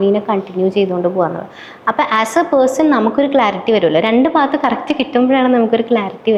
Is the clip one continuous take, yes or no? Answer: yes